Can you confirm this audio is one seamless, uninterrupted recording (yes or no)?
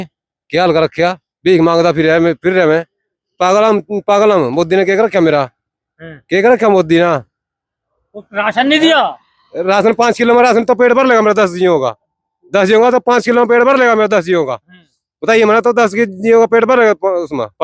yes